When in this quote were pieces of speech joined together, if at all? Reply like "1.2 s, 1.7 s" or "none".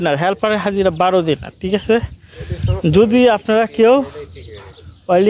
none